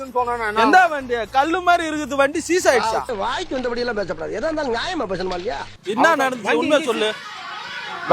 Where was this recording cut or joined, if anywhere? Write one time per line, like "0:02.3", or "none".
none